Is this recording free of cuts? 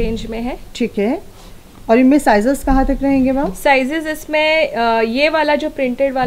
yes; 0 cuts

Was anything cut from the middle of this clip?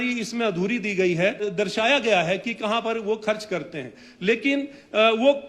yes; 1 cut; at 1.5 s

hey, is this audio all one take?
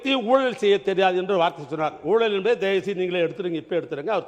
yes; 0 cuts

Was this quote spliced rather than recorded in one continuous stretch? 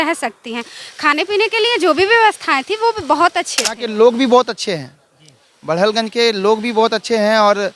yes; 1 cut; at 3.8 s

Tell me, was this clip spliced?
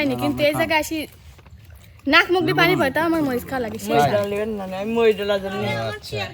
no; 0 cuts

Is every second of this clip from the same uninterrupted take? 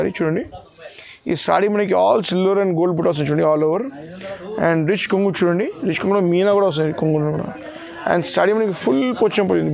yes; 0 cuts

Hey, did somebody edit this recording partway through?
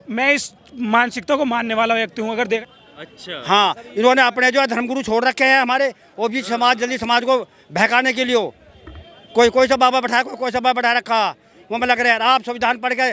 yes; 1 cut; at 2.6 s

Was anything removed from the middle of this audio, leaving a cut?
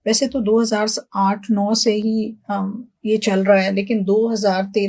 no; 0 cuts

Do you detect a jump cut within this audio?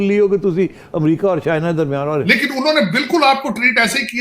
yes; 1 cut; at 2.2 s

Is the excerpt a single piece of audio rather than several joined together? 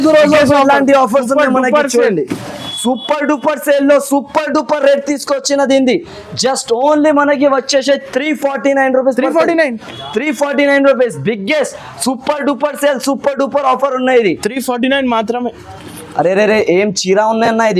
no; 1 cut; at 15.7 s

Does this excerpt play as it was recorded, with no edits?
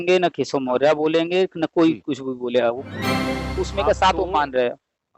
no; 1 cut; at 3.4 s

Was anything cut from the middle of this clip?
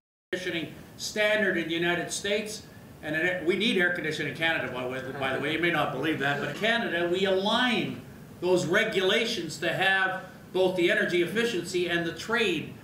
yes; 1 cut; at 6.5 s

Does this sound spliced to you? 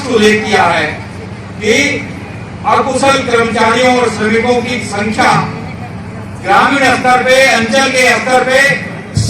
no; 0 cuts

